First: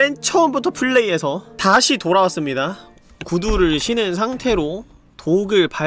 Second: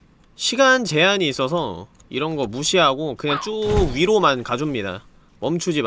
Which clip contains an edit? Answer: first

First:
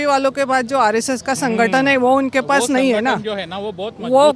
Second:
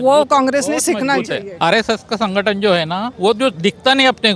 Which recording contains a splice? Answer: second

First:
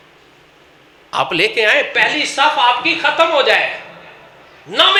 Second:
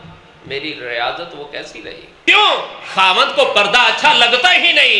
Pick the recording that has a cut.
second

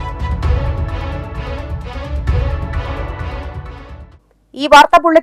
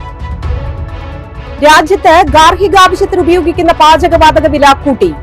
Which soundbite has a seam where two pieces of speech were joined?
second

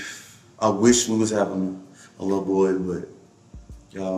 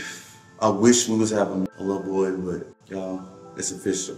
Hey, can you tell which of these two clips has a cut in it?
second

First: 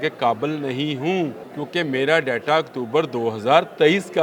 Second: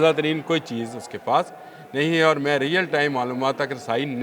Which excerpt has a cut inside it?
first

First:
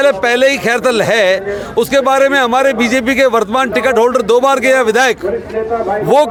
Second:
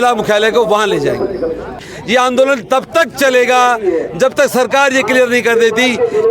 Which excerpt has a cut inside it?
second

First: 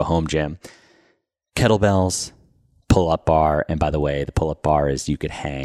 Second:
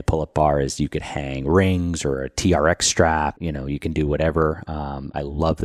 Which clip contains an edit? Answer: second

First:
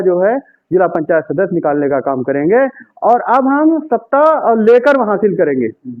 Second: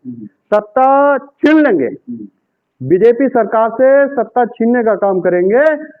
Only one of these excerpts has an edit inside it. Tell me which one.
first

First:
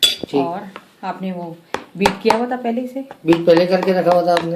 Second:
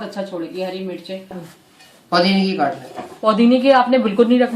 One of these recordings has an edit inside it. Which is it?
second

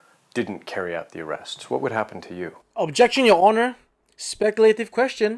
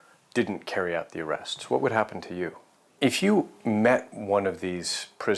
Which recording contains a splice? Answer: second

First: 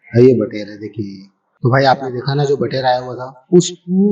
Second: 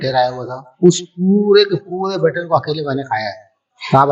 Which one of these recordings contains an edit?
first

